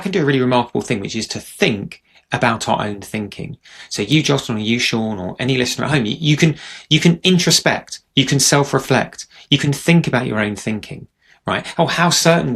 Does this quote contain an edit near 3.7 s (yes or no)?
no